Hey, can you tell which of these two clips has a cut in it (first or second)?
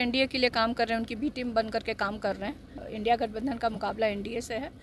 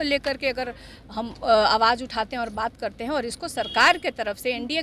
first